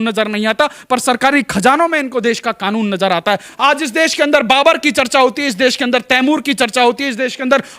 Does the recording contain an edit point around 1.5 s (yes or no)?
no